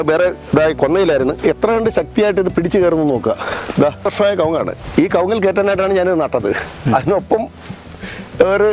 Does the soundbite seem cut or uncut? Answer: cut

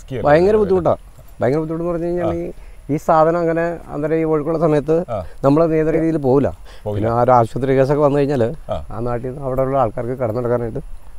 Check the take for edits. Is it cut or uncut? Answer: cut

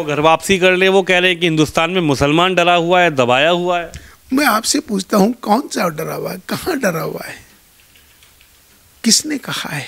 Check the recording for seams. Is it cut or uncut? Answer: uncut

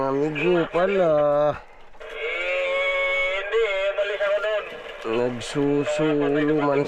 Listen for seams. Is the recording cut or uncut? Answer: uncut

